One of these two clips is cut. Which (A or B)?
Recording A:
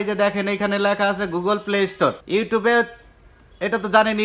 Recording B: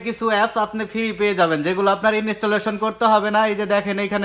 A